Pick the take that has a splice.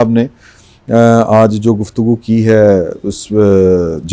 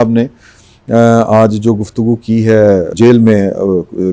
second; 1 cut; at 2.9 s

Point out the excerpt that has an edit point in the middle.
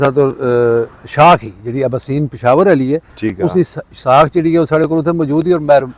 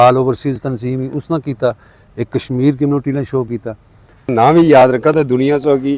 second; 1 cut; at 4.3 s

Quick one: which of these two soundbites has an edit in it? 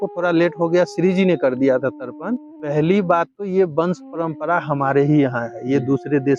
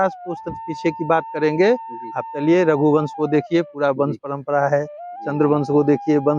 first; 1 cut; at 2.5 s

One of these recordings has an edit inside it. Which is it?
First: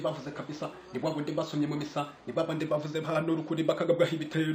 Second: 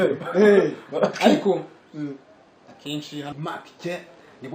second; 1 cut; at 3.3 s

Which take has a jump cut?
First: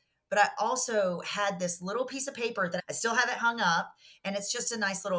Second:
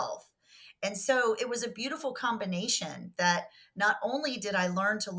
first; 1 cut; at 2.8 s

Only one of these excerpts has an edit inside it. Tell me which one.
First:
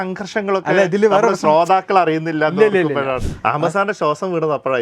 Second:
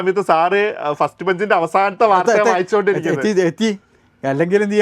first; 1 cut; at 3.2 s

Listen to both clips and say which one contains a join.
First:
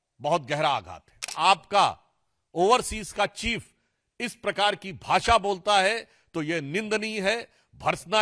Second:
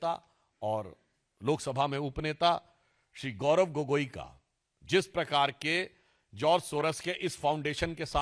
first; 1 cut; at 1.3 s

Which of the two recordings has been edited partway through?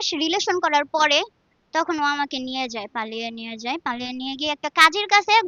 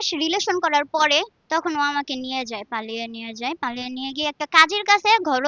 second; 1 cut; at 1.4 s

